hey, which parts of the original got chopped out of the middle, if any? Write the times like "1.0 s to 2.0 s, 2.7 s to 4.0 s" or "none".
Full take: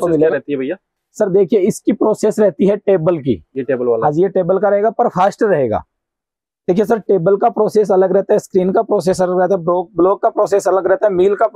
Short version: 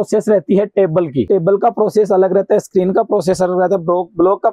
3.4 s to 7.1 s